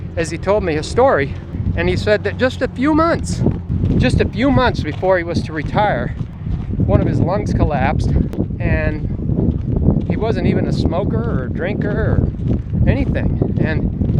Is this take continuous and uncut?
no; 1 cut; at 3.6 s

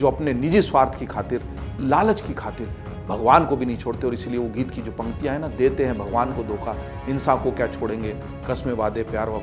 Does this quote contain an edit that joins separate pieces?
no; 0 cuts

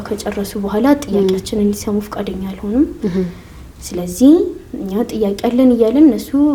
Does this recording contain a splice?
no; 0 cuts

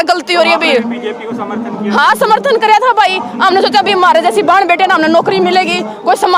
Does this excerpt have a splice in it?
no; 0 cuts

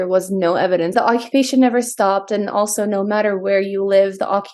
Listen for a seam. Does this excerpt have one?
yes; 1 cut; at 0.9 s

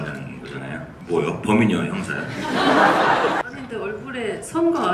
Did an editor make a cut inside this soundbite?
yes; 2 cuts; at 0.9 s, 3.4 s

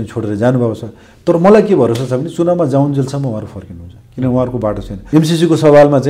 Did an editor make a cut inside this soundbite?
yes; 1 cut; at 4.9 s

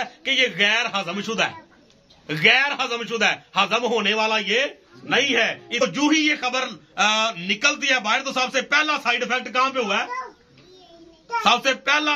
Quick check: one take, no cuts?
no; 1 cut; at 5.8 s

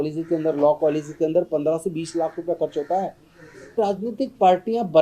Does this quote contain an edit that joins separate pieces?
yes; 1 cut; at 3.7 s

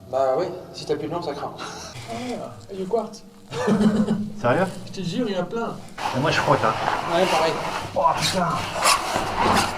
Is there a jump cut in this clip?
yes; 2 cuts; at 1.9 s, 6.0 s

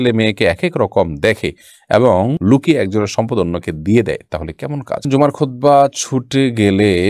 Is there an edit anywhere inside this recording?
yes; 1 cut; at 5.0 s

